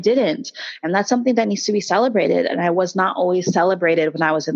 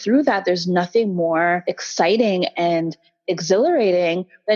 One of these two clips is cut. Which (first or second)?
second